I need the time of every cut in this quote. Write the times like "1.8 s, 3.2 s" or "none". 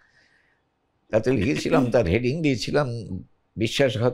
none